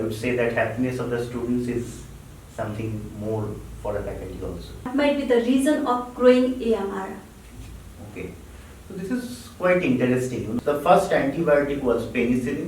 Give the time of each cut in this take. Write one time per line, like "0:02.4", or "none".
0:04.9
0:10.5

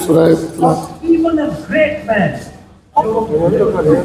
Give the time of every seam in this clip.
0:03.0

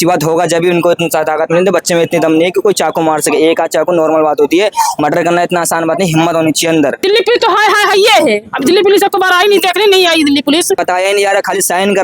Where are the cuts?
0:07.0
0:10.8

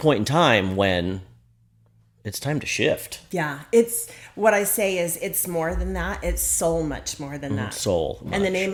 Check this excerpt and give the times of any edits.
none

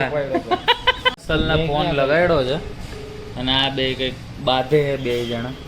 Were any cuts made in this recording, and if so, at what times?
0:01.2

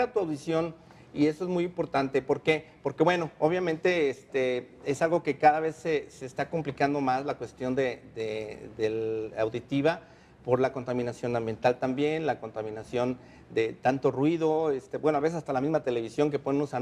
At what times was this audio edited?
none

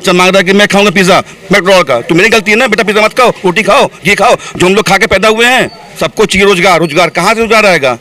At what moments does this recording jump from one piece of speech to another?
0:05.9

